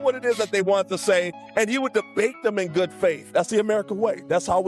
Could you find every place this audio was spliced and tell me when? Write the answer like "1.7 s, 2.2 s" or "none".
3.2 s